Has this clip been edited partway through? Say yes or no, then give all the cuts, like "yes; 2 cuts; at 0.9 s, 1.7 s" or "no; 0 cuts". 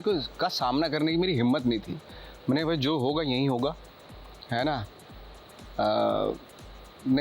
no; 0 cuts